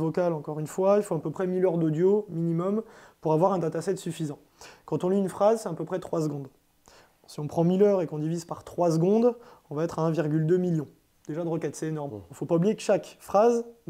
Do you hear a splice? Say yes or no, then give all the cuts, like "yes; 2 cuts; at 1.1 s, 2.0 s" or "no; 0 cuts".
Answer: no; 0 cuts